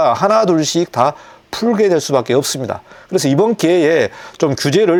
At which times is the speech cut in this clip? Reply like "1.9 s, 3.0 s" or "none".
none